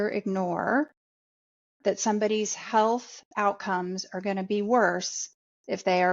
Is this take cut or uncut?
uncut